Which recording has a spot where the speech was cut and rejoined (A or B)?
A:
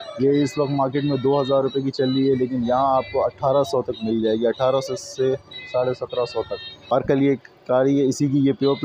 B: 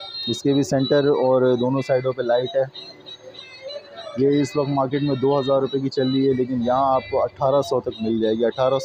A